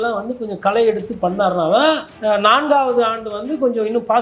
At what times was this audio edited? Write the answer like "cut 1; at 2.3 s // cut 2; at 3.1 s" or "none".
none